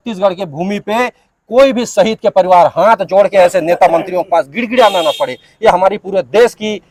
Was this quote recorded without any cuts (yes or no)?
yes